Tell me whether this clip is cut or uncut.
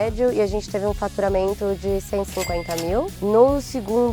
cut